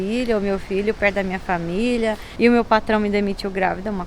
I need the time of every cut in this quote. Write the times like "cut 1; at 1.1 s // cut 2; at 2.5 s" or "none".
cut 1; at 2.3 s